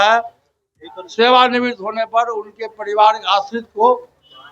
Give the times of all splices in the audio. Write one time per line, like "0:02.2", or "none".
none